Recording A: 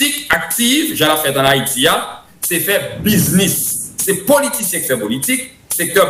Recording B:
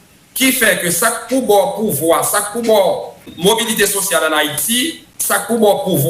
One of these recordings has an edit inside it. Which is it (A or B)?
B